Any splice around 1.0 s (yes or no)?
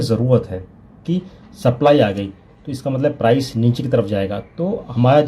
yes